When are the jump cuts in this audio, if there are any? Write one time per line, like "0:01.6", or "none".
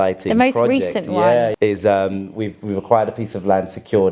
0:01.5